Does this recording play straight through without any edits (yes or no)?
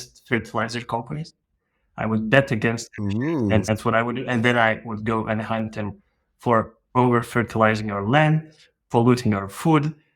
yes